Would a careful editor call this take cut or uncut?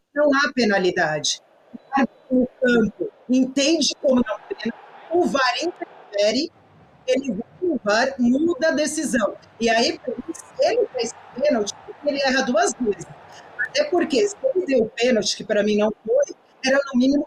uncut